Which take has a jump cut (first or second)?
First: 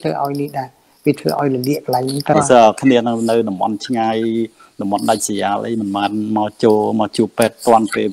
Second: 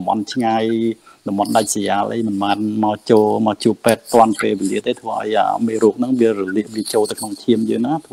first